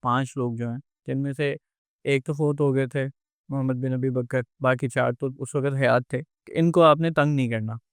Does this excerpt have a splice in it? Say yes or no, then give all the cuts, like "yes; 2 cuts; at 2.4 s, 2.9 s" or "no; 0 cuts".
no; 0 cuts